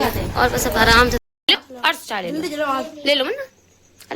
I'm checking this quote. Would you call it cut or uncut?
cut